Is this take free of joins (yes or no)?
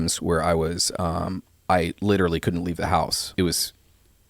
no